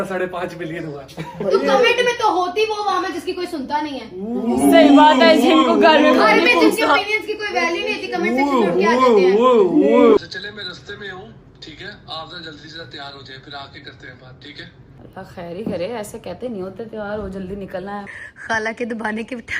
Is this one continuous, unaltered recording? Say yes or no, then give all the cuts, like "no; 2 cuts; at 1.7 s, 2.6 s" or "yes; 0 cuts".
no; 3 cuts; at 10.2 s, 14.9 s, 18.2 s